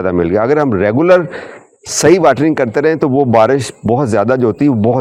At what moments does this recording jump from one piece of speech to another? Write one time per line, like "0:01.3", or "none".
none